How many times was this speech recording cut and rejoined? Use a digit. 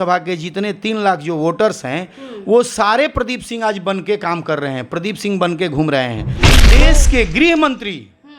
1